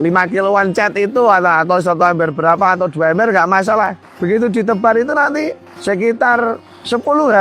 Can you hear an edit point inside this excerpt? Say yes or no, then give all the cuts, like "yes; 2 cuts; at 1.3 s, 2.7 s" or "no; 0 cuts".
no; 0 cuts